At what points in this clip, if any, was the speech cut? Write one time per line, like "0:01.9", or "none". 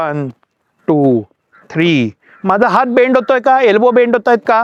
none